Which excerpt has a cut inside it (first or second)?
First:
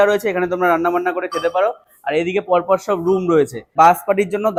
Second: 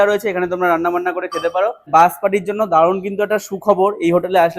second